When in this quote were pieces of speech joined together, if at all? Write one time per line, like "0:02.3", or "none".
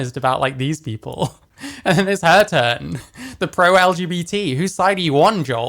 none